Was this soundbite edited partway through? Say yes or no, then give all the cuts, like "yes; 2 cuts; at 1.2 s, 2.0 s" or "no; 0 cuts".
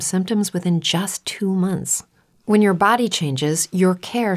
no; 0 cuts